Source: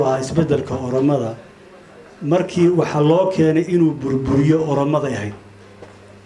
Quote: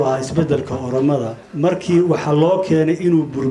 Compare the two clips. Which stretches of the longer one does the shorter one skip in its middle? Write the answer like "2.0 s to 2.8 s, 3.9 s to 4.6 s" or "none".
1.4 s to 2.1 s